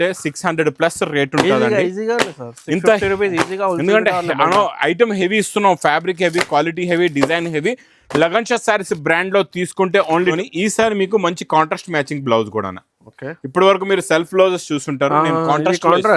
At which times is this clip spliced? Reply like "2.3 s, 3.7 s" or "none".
10.4 s